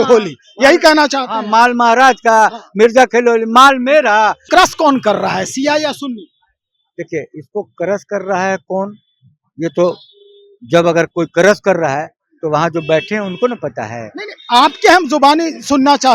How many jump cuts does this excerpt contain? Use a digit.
1